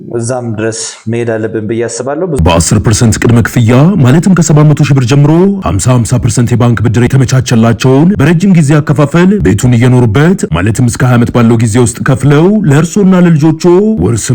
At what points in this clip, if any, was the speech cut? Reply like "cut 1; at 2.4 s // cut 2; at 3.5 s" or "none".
cut 1; at 2.4 s